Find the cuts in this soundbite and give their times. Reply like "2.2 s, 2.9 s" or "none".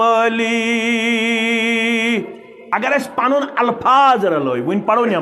2.5 s